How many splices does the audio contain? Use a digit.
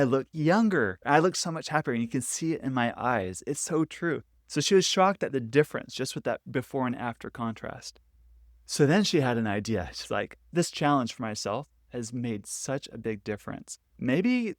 1